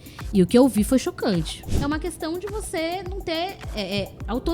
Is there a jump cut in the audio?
yes; 1 cut; at 1.7 s

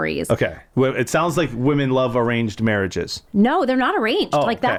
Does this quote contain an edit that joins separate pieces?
no; 0 cuts

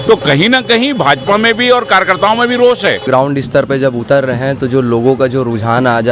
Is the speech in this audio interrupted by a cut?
yes; 1 cut; at 3.1 s

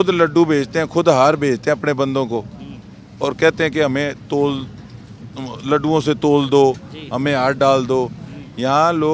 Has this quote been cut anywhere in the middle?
no; 0 cuts

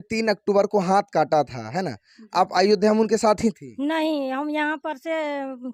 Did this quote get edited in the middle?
no; 0 cuts

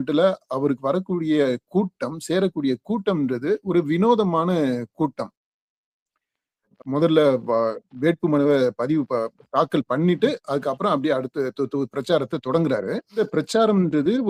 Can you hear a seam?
no; 0 cuts

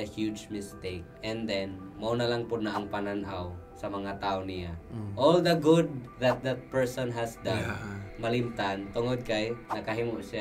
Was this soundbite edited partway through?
no; 0 cuts

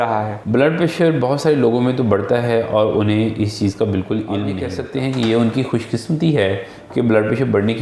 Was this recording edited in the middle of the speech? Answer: yes; 1 cut; at 4.7 s

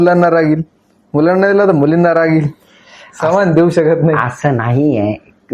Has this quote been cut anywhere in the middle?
no; 0 cuts

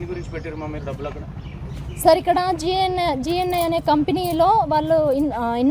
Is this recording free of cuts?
yes; 0 cuts

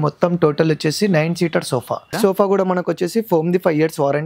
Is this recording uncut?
no; 1 cut; at 2.2 s

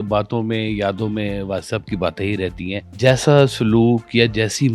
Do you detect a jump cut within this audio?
yes; 1 cut; at 2.8 s

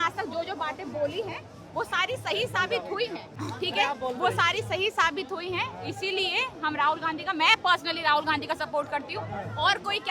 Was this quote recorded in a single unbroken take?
no; 1 cut; at 3.4 s

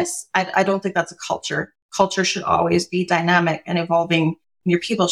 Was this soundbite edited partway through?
yes; 1 cut; at 1.8 s

